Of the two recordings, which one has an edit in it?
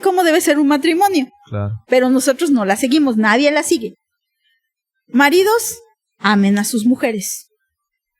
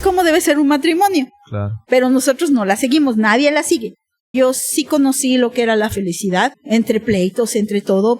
second; 2 cuts; at 4.3 s, 6.6 s

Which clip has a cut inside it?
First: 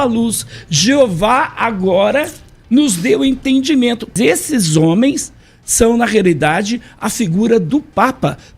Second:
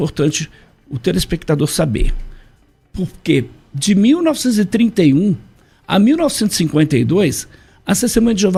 first; 1 cut; at 4.1 s

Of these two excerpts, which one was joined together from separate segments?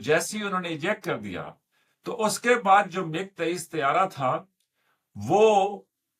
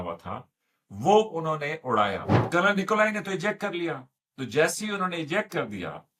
second; 1 cut; at 2.3 s

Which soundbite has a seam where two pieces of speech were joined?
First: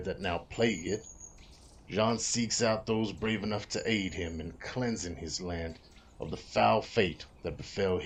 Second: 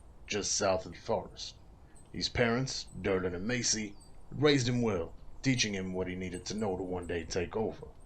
second; 1 cut; at 0.9 s

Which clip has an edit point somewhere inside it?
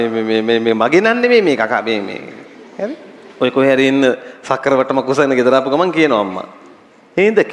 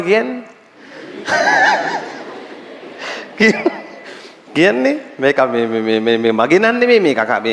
first; 1 cut; at 3.2 s

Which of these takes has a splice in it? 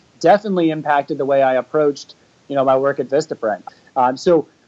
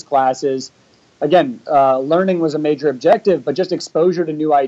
first; 1 cut; at 3.6 s

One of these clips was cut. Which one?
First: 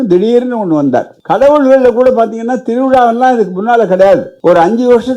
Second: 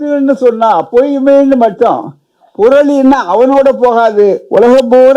first; 2 cuts; at 1.1 s, 4.3 s

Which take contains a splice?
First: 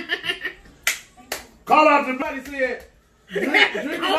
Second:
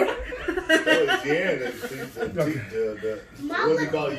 first; 1 cut; at 2.1 s

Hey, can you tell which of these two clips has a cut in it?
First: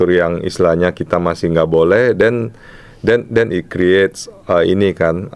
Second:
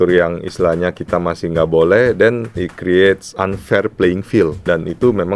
second; 3 cuts; at 2.6 s, 3.3 s, 4.6 s

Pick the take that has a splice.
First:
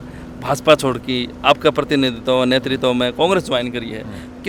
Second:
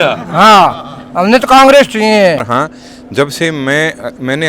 second; 1 cut; at 2.4 s

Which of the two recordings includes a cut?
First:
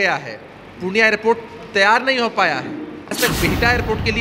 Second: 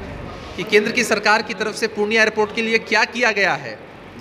first; 1 cut; at 3.2 s

